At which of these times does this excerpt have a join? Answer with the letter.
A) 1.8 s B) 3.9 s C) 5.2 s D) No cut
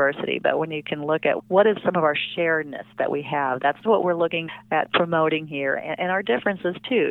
A